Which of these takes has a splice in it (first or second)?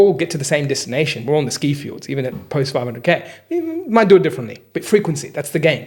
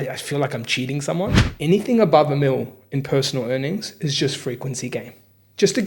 second